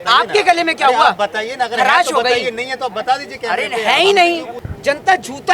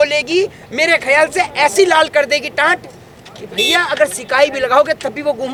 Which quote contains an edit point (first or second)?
first